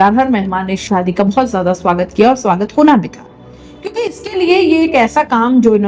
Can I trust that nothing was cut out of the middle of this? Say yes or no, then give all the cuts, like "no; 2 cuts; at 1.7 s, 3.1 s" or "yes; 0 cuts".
yes; 0 cuts